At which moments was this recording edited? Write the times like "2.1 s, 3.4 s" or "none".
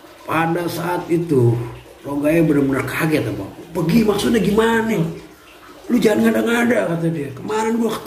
5.0 s